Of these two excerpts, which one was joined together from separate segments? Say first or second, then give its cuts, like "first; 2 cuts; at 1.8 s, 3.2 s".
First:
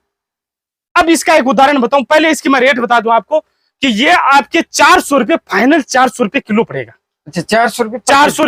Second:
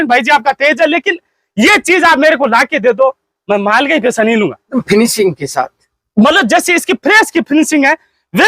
second; 1 cut; at 4.7 s